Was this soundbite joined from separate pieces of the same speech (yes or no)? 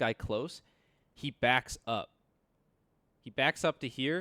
no